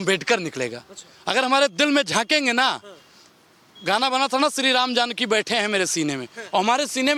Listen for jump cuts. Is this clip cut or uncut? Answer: uncut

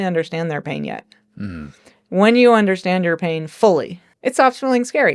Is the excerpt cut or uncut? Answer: cut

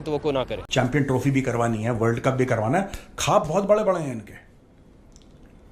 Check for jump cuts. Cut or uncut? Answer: uncut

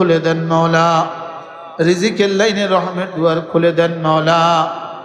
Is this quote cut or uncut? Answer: uncut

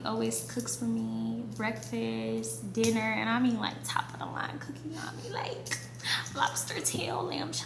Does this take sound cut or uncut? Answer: uncut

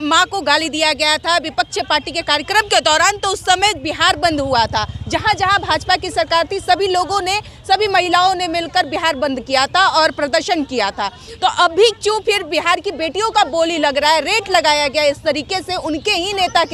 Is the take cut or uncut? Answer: uncut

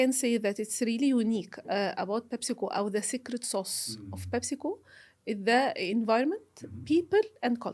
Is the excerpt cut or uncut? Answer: uncut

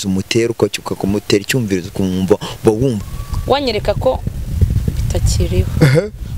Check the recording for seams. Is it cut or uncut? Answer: cut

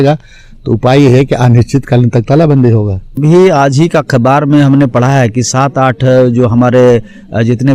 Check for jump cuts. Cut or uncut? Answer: cut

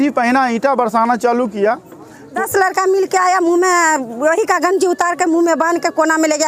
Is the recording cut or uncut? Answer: cut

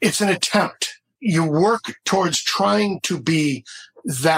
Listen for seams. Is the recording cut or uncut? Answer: cut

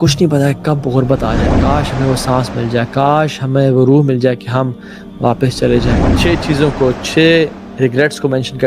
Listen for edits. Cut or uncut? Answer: cut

